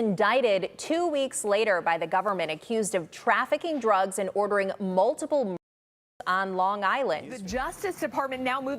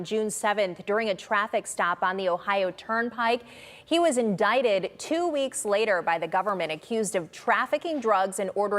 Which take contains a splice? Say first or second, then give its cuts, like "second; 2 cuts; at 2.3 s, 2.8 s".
first; 1 cut; at 7.4 s